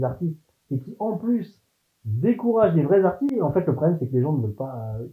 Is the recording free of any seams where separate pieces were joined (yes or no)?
no